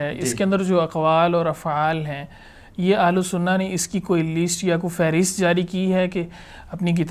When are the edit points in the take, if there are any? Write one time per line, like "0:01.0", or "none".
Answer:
none